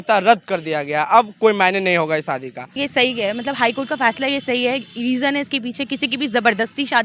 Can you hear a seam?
yes; 1 cut; at 2.8 s

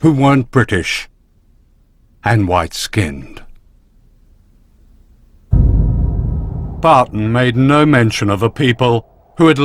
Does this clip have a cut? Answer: no; 0 cuts

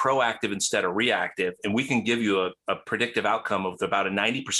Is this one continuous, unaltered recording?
yes; 0 cuts

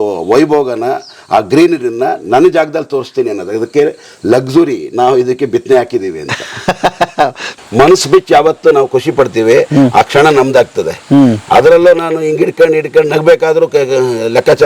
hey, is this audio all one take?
no; 1 cut; at 7.5 s

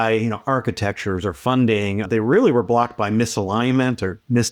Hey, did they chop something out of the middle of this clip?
yes; 1 cut; at 2.1 s

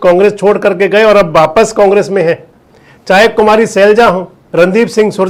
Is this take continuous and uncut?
yes; 0 cuts

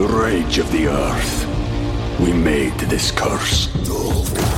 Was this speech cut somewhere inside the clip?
no; 0 cuts

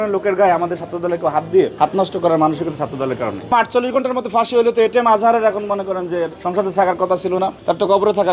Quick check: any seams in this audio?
yes; 3 cuts; at 1.7 s, 3.5 s, 6.4 s

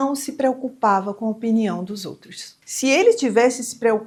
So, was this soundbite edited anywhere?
no; 0 cuts

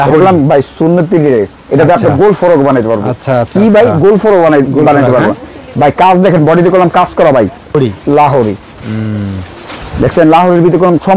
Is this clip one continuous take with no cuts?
no; 1 cut; at 7.7 s

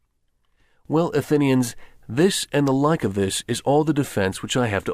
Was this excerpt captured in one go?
no; 1 cut; at 3.0 s

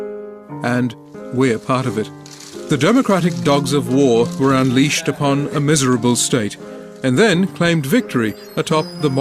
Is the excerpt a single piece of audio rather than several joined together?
yes; 0 cuts

